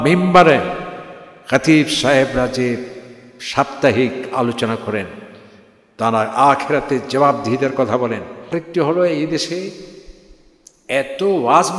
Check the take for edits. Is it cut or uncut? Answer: cut